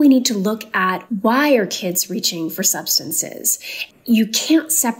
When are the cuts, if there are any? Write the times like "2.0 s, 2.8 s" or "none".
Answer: 1.0 s, 3.9 s